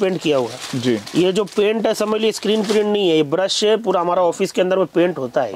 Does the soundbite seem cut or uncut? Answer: uncut